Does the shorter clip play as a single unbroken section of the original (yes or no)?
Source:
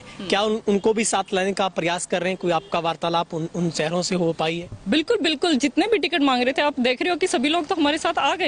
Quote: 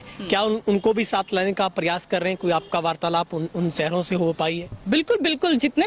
yes